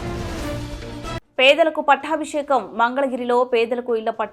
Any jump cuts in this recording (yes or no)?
yes